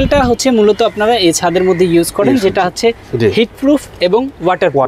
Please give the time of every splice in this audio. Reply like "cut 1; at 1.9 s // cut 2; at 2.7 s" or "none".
none

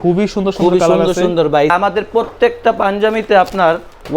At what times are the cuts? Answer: cut 1; at 1.7 s

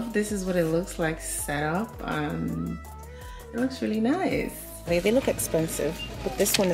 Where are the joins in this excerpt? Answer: cut 1; at 4.9 s

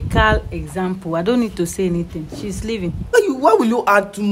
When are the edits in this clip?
cut 1; at 3.1 s

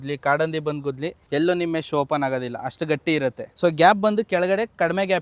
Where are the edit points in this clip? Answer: cut 1; at 1.1 s // cut 2; at 3.5 s

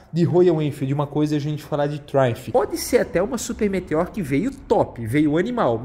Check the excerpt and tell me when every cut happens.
cut 1; at 2.4 s

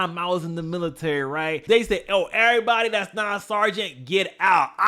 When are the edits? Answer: cut 1; at 1.6 s

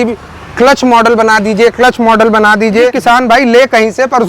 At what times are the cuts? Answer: cut 1; at 3.0 s

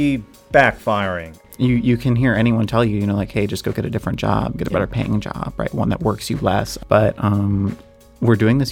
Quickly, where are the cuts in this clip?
cut 1; at 1.4 s // cut 2; at 6.7 s

